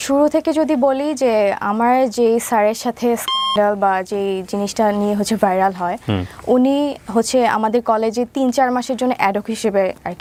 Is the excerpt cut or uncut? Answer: uncut